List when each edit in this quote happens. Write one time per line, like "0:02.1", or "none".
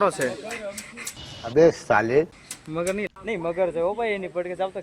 0:03.1